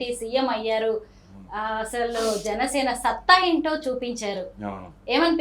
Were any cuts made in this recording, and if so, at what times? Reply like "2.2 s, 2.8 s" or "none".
none